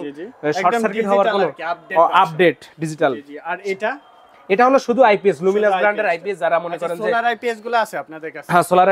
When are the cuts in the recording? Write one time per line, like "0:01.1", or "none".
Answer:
none